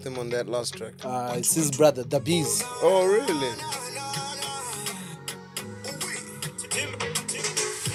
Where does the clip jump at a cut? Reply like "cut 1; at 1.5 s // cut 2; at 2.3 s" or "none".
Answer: none